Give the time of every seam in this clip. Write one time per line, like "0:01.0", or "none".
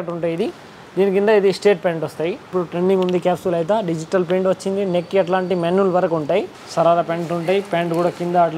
0:02.5
0:06.6